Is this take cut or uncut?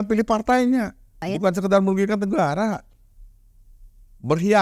cut